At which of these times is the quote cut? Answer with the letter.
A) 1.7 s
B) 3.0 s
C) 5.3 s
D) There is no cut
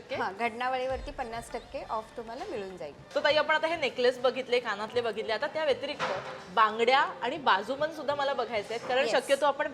D